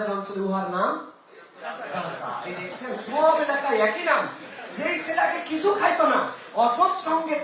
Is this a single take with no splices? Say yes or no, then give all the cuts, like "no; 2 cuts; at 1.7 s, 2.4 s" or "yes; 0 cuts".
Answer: yes; 0 cuts